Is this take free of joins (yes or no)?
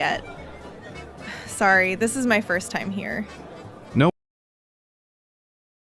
yes